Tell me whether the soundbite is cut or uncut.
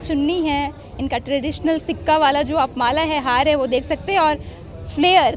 uncut